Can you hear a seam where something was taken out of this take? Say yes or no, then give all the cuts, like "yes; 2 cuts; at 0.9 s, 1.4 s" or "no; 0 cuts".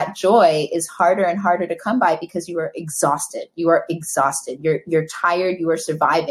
no; 0 cuts